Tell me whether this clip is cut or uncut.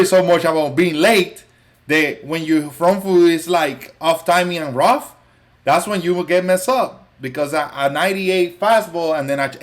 uncut